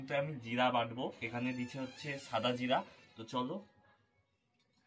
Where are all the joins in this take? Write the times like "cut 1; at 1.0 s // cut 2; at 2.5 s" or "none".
none